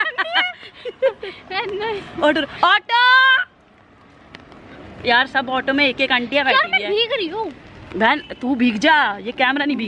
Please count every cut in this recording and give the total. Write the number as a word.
zero